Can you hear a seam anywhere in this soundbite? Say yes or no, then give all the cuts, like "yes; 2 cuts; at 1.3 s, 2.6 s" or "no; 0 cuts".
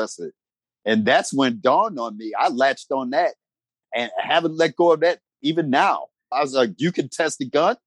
no; 0 cuts